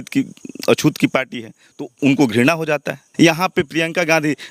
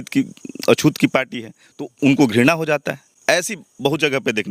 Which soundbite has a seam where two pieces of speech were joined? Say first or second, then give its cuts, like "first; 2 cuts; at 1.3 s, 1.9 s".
first; 1 cut; at 3.0 s